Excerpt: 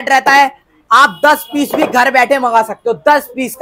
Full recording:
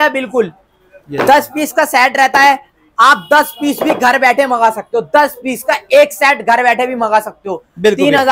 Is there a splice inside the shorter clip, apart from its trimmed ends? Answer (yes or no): no